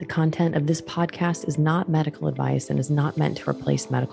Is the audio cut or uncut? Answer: uncut